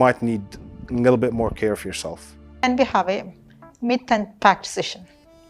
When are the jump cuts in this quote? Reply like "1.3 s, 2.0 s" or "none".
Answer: 2.6 s